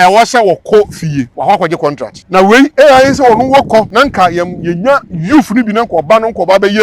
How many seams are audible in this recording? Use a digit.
3